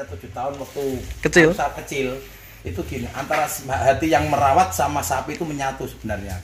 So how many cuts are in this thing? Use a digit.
0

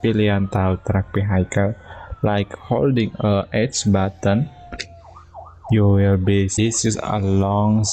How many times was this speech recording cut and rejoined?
1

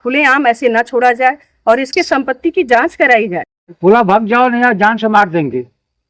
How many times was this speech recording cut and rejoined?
1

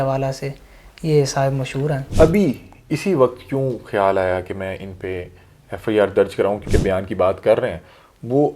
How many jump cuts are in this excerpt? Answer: 2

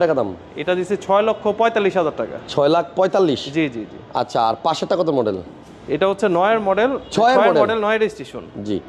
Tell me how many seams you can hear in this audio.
0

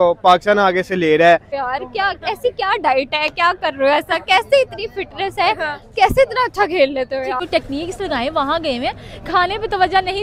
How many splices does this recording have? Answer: 2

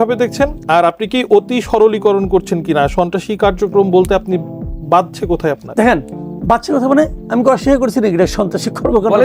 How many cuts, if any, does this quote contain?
0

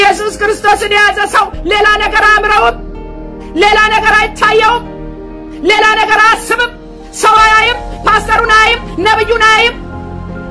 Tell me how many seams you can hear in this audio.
1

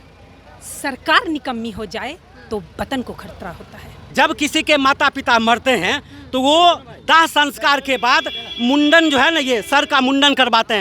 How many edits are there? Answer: 1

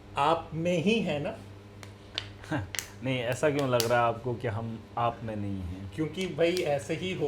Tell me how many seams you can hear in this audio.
0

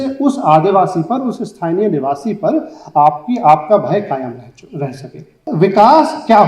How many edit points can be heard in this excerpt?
1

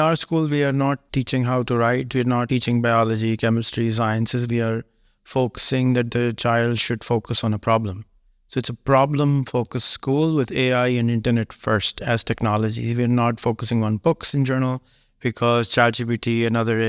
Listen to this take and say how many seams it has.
2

